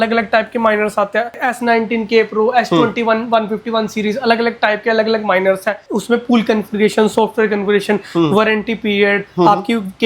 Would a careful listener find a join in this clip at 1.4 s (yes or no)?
yes